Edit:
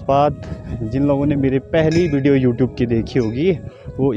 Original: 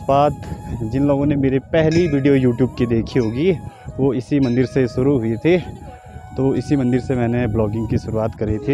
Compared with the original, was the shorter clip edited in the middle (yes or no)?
no